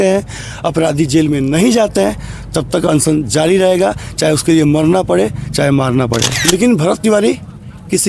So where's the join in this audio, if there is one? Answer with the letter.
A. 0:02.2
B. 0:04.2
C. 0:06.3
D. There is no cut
C